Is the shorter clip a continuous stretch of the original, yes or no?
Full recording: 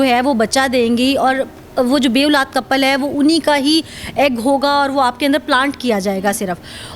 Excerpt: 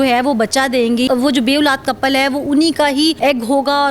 no